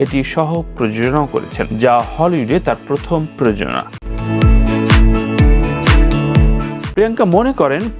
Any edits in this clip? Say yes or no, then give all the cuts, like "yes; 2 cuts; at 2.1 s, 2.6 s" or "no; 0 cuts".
no; 0 cuts